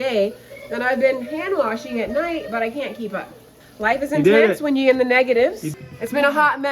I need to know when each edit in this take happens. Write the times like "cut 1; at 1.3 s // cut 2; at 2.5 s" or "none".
cut 1; at 3.6 s // cut 2; at 5.6 s